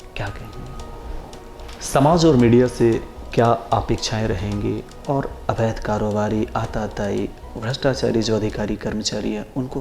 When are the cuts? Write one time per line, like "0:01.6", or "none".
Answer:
0:01.1

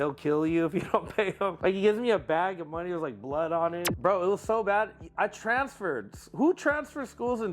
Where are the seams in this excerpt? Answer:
0:01.5
0:03.9

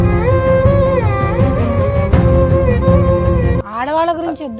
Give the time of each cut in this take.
0:03.6

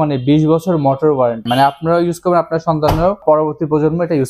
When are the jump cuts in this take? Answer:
0:01.5
0:03.2

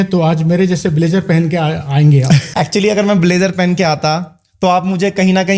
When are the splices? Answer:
0:02.5

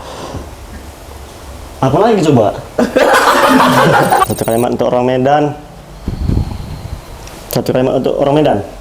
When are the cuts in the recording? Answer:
0:04.2

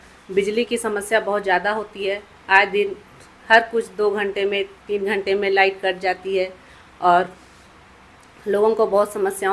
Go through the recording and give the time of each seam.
none

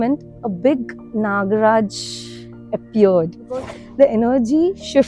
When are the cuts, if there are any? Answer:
0:03.8

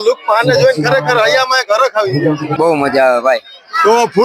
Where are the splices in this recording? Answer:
0:02.5

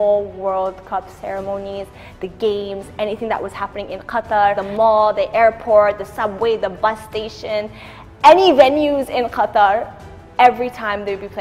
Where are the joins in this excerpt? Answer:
0:04.6

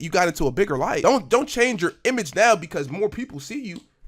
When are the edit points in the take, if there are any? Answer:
0:01.0

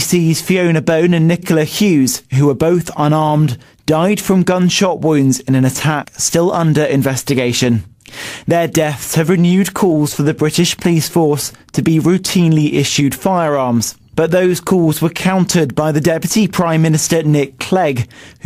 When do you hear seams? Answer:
none

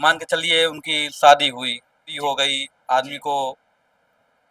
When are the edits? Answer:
0:02.1

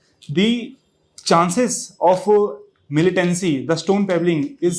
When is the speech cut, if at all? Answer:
none

